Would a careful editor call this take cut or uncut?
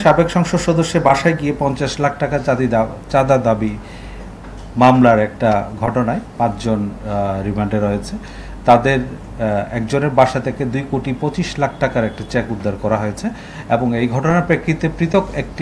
uncut